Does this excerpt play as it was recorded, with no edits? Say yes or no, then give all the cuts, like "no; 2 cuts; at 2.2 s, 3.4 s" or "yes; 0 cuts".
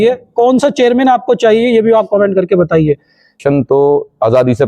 no; 1 cut; at 3.4 s